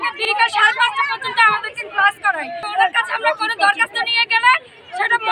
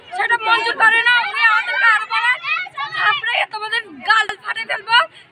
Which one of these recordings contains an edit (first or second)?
first